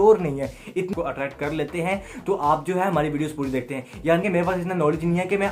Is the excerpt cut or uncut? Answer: cut